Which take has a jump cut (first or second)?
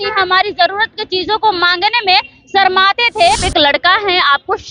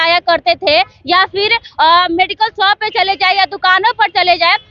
first